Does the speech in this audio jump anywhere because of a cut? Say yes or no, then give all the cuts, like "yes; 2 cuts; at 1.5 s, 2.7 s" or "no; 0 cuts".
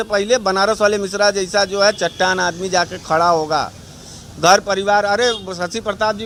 no; 0 cuts